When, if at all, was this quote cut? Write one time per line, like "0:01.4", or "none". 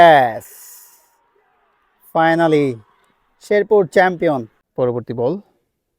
0:04.6